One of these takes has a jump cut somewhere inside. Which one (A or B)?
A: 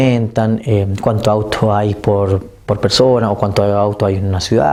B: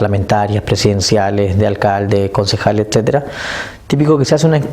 B